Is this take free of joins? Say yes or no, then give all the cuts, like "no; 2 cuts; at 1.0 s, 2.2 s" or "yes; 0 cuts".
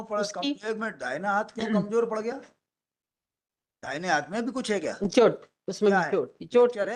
yes; 0 cuts